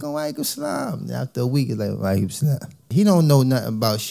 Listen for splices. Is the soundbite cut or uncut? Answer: cut